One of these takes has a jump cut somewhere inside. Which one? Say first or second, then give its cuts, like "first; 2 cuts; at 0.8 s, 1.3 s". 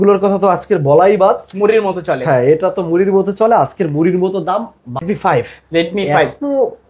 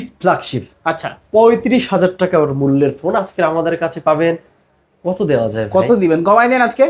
first; 1 cut; at 5.0 s